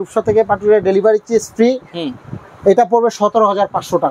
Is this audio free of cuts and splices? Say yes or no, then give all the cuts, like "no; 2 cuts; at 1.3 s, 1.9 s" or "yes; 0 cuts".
yes; 0 cuts